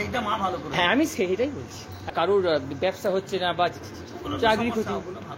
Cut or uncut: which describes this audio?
cut